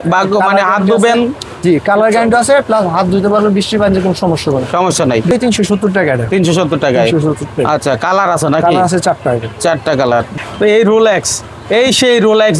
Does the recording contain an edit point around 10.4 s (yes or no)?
yes